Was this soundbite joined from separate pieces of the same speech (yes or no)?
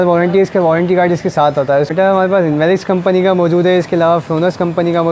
yes